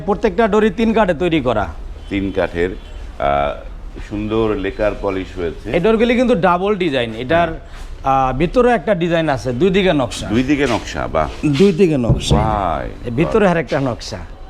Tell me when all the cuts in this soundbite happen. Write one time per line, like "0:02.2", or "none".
none